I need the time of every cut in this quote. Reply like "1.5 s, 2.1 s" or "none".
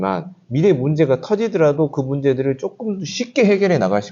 none